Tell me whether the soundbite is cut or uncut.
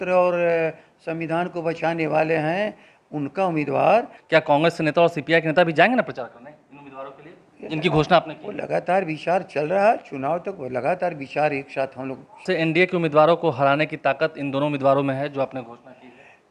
cut